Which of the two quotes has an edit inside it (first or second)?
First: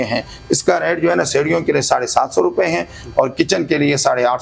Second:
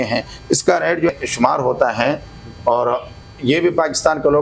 second